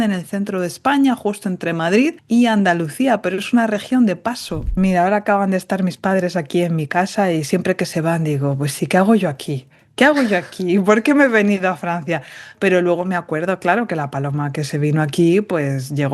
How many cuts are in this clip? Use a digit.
2